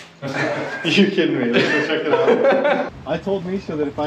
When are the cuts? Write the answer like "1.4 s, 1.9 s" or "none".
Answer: 2.9 s